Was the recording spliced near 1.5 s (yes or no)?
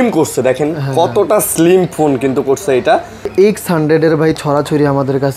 no